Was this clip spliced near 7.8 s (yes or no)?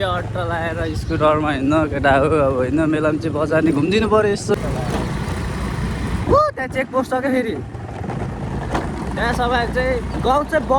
no